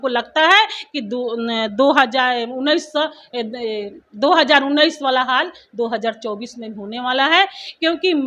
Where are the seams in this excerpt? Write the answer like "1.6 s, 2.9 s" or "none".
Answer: none